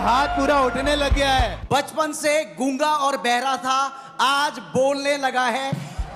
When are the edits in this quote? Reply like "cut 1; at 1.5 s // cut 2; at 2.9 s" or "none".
cut 1; at 1.6 s